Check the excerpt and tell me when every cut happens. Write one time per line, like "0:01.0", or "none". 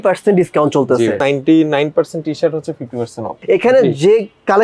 0:01.2
0:03.3